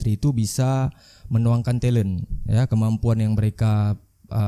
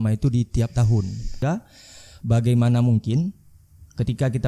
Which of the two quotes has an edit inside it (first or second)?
second